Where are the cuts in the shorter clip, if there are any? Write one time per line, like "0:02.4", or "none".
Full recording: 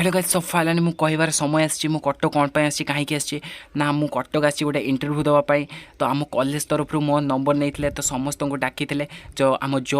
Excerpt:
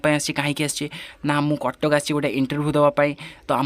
none